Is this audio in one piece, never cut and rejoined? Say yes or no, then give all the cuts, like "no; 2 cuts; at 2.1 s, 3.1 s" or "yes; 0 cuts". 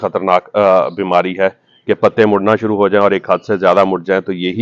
yes; 0 cuts